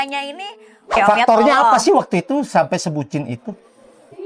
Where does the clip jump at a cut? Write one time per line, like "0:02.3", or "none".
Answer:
0:01.0